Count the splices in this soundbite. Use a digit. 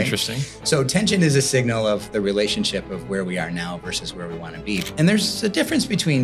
1